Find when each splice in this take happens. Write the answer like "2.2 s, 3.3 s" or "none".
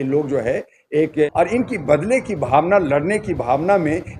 1.3 s